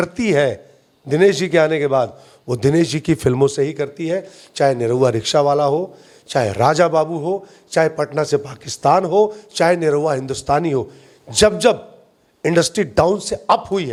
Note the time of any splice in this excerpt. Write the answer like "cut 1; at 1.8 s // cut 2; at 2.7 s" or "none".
none

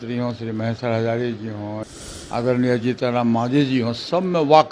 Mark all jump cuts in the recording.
cut 1; at 1.8 s

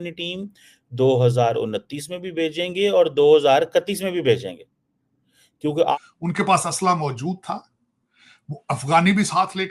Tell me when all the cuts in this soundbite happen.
cut 1; at 5.9 s

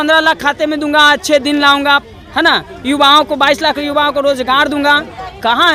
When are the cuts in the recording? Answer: none

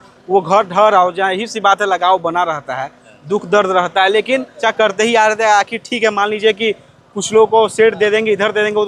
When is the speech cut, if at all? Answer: cut 1; at 4.6 s

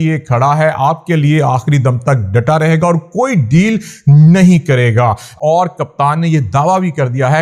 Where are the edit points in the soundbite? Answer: cut 1; at 5.4 s

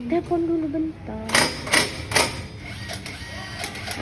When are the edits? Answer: none

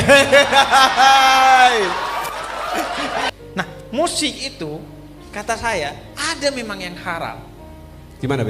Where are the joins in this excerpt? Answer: cut 1; at 3.3 s

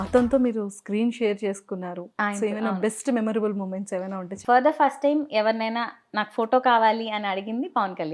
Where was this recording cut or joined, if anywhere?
cut 1; at 4.3 s

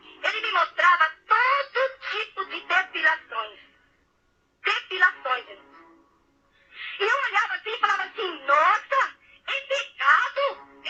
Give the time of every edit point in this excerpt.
none

